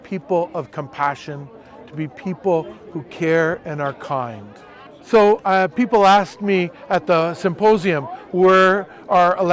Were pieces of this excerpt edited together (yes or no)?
yes